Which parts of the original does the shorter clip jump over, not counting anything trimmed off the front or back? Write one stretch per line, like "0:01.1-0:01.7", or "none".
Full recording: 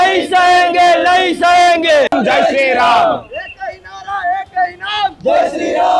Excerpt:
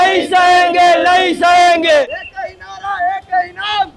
0:02.1-0:03.3